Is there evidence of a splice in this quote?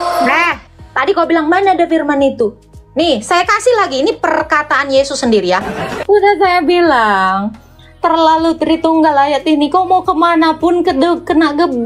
yes; 1 cut; at 5.7 s

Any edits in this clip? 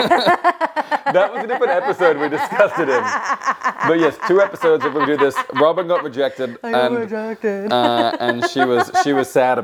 no; 0 cuts

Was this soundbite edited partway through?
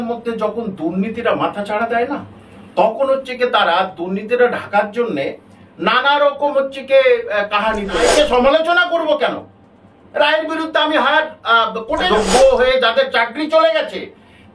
yes; 2 cuts; at 8.0 s, 12.1 s

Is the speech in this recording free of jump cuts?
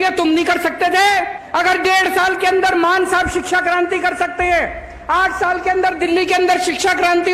no; 1 cut; at 1.4 s

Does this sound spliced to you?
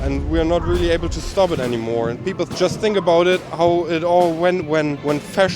yes; 1 cut; at 2.5 s

